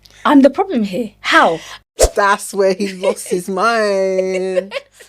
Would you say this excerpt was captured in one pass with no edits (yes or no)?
no